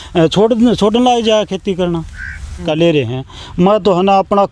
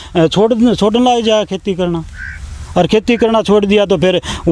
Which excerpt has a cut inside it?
first; 1 cut; at 2.6 s

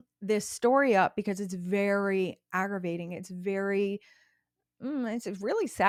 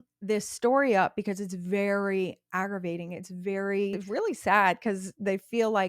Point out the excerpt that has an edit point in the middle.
second; 1 cut; at 4.0 s

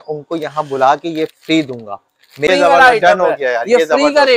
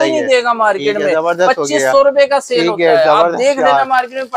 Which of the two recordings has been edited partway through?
first; 1 cut; at 2.5 s

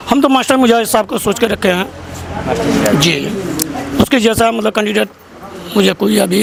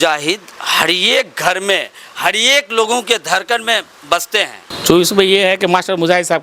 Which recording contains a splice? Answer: second; 1 cut; at 4.7 s

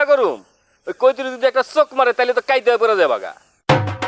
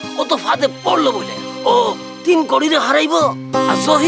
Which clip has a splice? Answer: second; 1 cut; at 1.4 s

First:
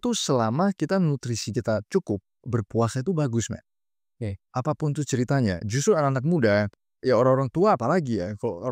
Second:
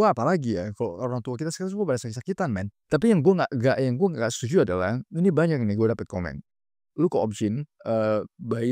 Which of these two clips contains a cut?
second; 1 cut; at 2.7 s

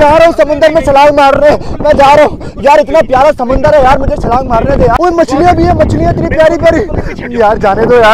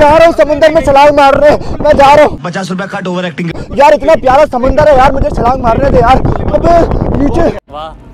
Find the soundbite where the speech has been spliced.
first; 2 cuts; at 2.5 s, 4.9 s

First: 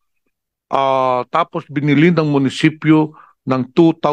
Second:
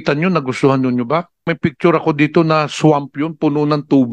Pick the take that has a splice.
second; 1 cut; at 1.5 s

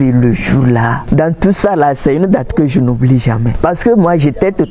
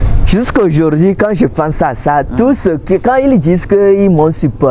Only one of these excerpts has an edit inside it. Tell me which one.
first; 2 cuts; at 1.0 s, 3.5 s

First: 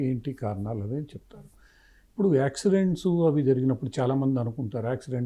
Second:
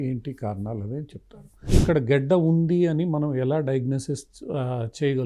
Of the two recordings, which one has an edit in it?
second; 1 cut; at 1.6 s

